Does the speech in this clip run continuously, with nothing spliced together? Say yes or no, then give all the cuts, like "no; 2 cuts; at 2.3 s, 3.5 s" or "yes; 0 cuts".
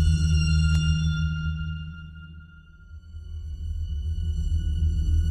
yes; 0 cuts